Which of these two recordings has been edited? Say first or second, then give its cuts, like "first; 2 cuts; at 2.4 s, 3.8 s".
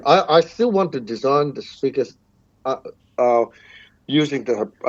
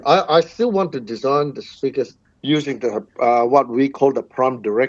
second; 1 cut; at 2.2 s